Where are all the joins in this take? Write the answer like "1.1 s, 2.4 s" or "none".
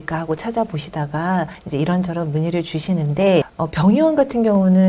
1.6 s, 3.6 s